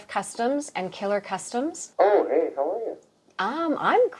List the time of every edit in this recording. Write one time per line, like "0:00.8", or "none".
0:01.8